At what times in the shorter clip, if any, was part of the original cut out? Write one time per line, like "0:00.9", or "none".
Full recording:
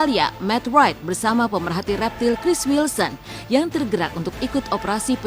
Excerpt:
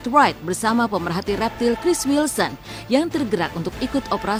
none